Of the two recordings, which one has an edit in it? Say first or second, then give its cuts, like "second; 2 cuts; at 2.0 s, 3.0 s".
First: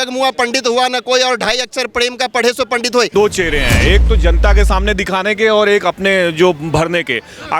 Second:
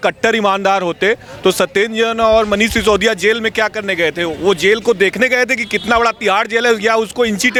first; 1 cut; at 3.1 s